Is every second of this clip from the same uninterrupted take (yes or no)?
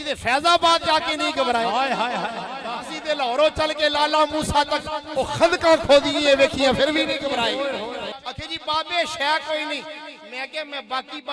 no